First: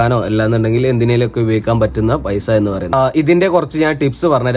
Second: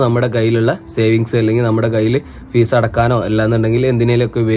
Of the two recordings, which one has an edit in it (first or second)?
first